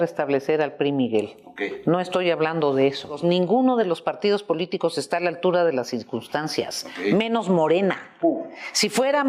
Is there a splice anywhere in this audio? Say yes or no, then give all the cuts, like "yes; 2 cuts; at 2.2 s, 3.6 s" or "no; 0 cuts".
yes; 1 cut; at 3.1 s